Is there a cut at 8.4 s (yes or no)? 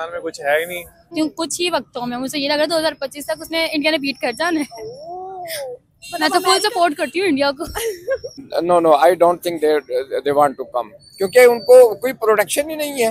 yes